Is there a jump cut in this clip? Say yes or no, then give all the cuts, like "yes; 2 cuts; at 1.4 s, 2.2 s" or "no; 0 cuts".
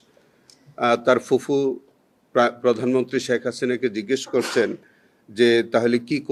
no; 0 cuts